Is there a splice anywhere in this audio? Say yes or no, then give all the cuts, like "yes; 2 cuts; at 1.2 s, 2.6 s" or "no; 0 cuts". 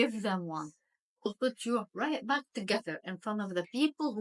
yes; 1 cut; at 1.3 s